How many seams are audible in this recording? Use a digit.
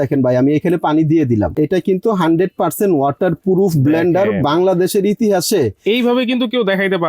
1